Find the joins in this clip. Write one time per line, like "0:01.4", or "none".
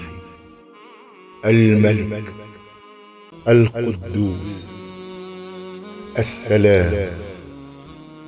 0:04.6
0:06.1